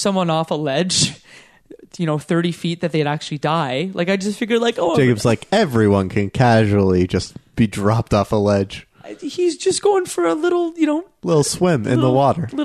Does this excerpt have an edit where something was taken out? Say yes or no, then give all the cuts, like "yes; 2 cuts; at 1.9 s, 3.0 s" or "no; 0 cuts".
no; 0 cuts